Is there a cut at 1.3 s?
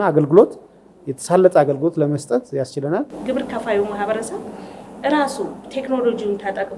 no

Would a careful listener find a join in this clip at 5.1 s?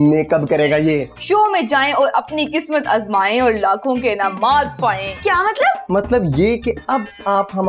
yes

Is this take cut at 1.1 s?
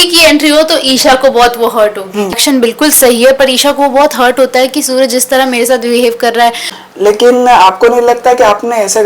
no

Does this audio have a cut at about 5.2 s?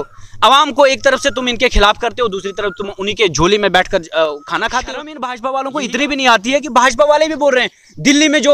yes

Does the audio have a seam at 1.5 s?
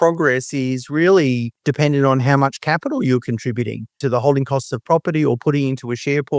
yes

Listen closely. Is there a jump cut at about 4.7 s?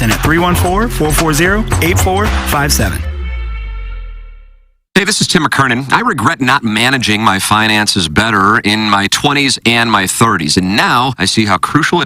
yes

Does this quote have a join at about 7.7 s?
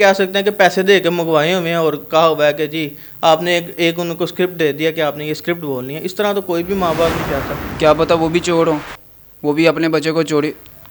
yes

